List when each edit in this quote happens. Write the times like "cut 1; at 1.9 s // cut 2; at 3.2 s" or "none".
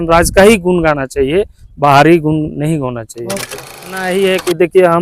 cut 1; at 4.1 s